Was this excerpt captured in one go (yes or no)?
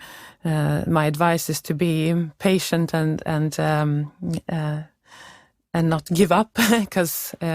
yes